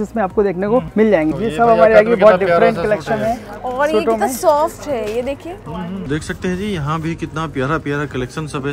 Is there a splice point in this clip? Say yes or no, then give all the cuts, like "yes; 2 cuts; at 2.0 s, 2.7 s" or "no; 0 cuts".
yes; 2 cuts; at 1.3 s, 6.0 s